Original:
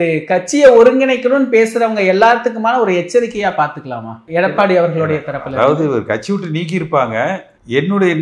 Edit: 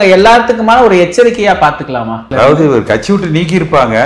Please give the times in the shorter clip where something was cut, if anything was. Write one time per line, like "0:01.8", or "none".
0:02.2